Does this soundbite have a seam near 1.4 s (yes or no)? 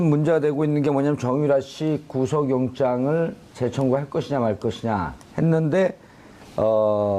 yes